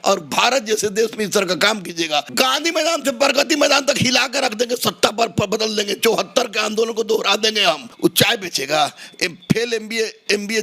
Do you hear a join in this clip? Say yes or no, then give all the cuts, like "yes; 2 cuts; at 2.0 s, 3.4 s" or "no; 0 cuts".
yes; 2 cuts; at 2.3 s, 7.9 s